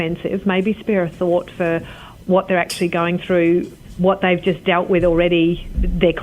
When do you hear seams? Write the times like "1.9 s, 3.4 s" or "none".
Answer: none